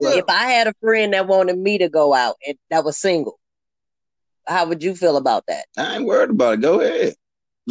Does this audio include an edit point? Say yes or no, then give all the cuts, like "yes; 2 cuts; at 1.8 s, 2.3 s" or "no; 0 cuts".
no; 0 cuts